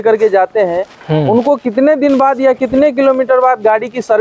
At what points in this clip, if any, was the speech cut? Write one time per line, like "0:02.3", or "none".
none